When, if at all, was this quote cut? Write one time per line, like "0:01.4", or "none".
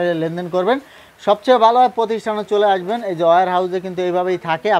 none